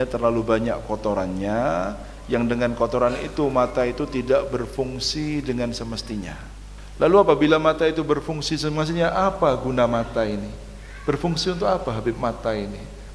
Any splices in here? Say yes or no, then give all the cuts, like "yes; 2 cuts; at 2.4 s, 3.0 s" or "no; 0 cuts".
yes; 1 cut; at 6.4 s